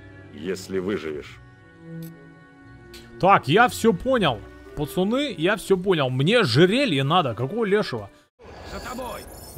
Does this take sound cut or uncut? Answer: cut